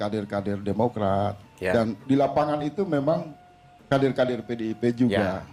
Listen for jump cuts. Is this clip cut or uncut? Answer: uncut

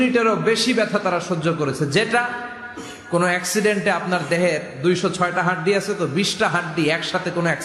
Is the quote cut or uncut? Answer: uncut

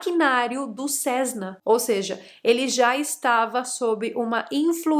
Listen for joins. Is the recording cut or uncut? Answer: cut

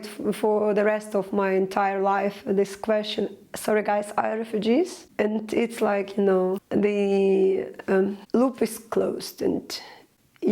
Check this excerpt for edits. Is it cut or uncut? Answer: cut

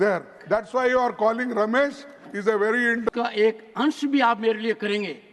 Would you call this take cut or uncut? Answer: cut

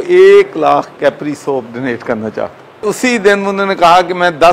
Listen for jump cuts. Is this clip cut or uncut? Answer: cut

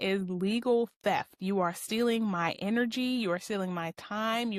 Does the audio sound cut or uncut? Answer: uncut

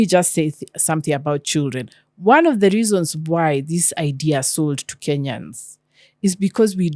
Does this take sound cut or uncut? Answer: uncut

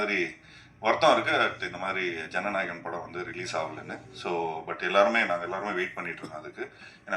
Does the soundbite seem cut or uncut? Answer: uncut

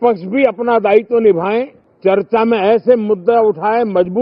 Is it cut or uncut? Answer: cut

